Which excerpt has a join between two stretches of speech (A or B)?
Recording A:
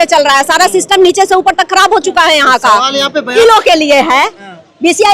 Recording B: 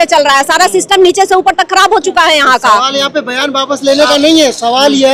A